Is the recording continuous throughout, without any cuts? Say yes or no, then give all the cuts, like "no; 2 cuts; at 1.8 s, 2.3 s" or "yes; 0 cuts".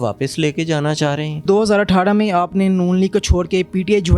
no; 1 cut; at 1.4 s